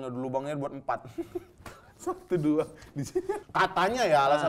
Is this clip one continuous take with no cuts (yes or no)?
no